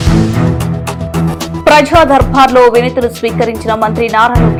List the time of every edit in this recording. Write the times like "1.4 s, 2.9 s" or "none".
none